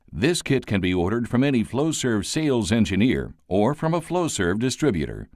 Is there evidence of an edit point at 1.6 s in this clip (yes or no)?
no